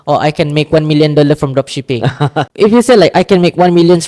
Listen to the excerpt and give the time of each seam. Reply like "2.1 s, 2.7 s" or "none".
none

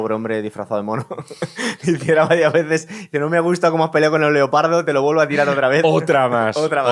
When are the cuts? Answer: none

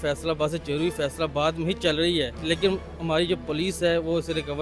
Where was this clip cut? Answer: 2.4 s

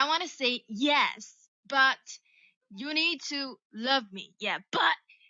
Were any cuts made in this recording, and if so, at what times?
none

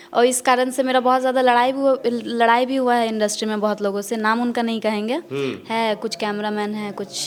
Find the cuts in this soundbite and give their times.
none

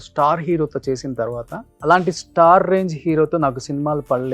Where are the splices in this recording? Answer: 1.6 s

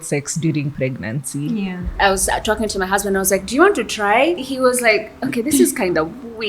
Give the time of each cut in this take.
1.9 s, 4.4 s

